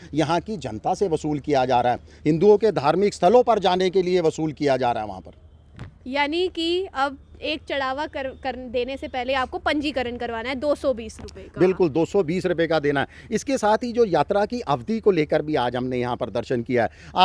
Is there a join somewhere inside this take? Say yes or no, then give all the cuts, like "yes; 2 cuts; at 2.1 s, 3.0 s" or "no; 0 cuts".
no; 0 cuts